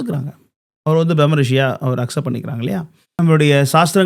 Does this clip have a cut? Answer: yes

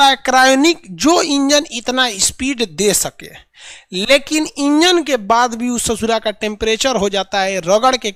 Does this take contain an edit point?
no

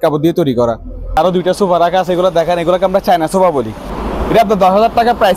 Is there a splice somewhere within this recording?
yes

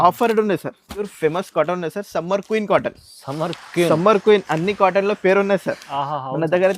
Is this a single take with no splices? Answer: no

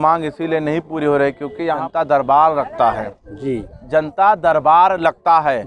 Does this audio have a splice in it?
yes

